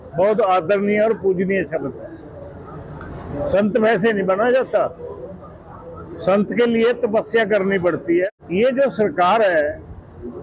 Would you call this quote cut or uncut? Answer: cut